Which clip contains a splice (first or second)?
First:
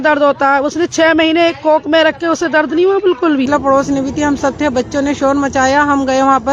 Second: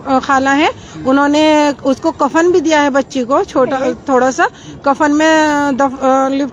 first